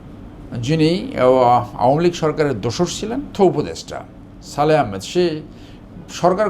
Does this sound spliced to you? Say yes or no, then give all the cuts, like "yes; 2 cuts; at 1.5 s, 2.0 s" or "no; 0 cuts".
yes; 1 cut; at 3.3 s